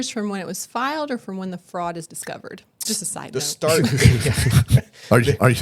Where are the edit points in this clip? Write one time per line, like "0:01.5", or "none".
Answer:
0:02.8